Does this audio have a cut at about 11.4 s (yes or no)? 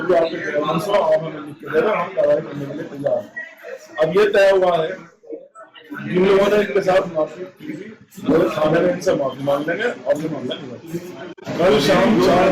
yes